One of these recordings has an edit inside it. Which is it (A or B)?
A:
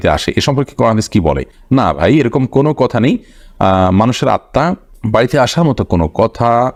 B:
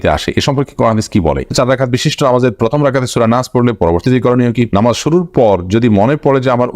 B